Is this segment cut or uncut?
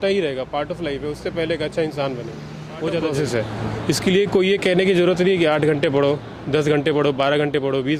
cut